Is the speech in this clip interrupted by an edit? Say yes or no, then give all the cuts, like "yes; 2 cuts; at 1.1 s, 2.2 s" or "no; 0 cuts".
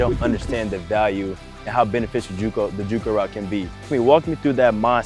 yes; 1 cut; at 3.9 s